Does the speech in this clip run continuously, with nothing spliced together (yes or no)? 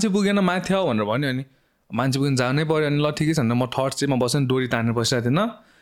yes